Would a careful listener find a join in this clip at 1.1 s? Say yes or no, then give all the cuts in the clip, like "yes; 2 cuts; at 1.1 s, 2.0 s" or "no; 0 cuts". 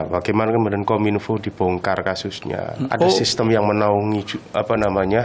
no; 1 cut; at 2.8 s